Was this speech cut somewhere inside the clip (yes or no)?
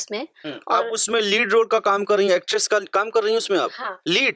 no